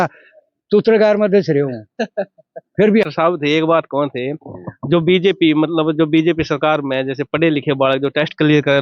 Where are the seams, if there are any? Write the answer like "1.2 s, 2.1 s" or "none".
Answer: 3.1 s

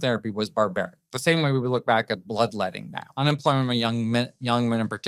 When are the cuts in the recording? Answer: 3.0 s

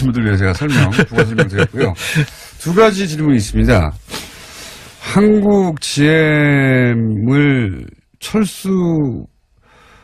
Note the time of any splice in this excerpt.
none

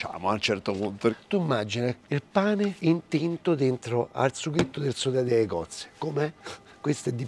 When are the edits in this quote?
1.2 s, 2.8 s, 5.3 s, 6.4 s

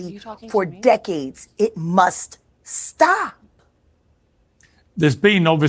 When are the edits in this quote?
1.4 s

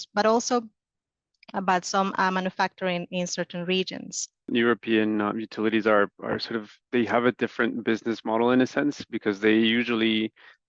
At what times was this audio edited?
4.5 s

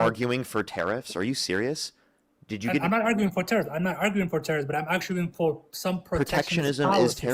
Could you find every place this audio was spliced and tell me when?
none

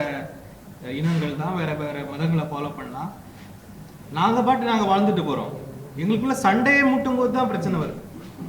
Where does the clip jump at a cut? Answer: none

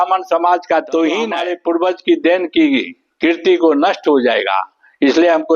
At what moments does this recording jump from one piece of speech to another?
1.5 s

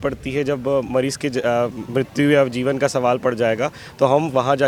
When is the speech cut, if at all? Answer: none

